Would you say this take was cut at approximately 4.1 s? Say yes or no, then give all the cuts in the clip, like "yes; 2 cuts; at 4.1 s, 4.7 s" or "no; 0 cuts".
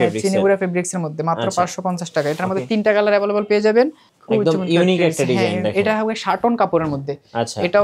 yes; 1 cut; at 4.1 s